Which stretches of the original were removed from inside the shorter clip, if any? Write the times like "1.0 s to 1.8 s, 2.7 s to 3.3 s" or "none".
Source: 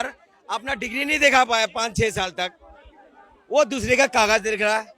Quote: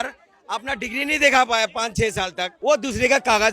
2.5 s to 3.3 s